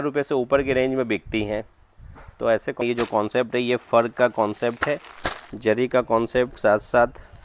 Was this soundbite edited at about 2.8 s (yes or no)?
yes